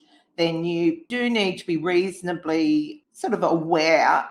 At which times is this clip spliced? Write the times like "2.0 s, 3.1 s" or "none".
1.1 s